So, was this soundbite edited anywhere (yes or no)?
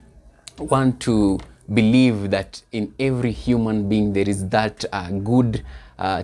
no